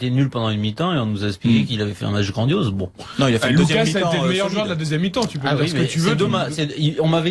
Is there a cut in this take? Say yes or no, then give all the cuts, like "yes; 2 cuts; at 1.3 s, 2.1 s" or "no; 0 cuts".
no; 0 cuts